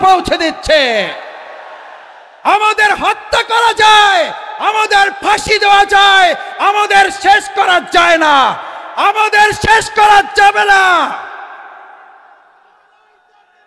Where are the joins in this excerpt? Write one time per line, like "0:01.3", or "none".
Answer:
none